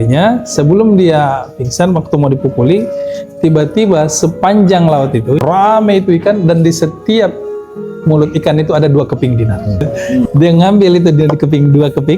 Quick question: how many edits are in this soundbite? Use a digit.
2